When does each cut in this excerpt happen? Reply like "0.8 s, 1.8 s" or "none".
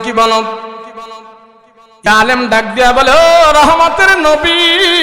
2.1 s